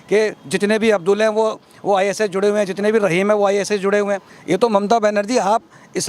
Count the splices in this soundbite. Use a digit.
1